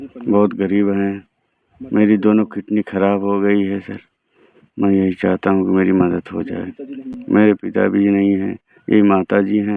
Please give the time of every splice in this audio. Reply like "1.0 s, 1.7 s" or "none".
none

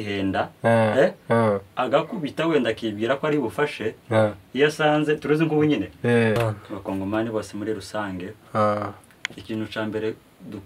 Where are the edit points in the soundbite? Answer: 6.4 s

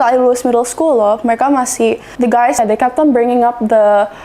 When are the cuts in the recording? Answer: 2.4 s

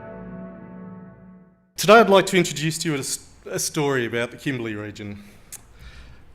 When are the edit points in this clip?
none

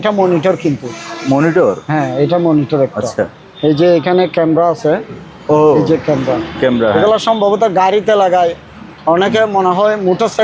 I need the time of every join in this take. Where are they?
none

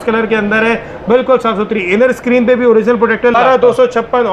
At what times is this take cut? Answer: 3.4 s

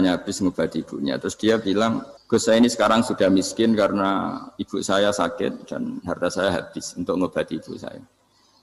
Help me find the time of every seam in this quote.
2.1 s

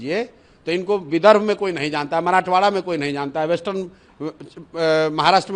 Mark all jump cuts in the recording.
none

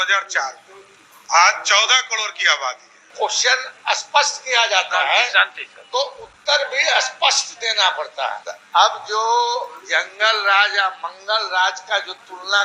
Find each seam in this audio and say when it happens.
3.1 s, 8.5 s

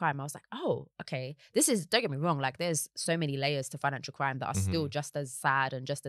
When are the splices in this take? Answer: none

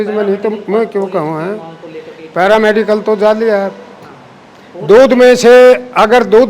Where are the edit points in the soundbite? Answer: none

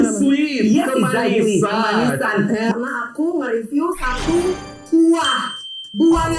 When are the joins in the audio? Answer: 2.7 s

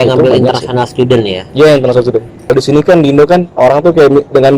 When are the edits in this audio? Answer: 2.5 s

